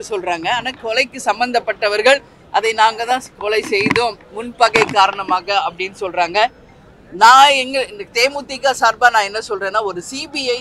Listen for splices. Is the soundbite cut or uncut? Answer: uncut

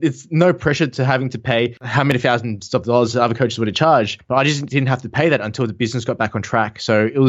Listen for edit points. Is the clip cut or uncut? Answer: cut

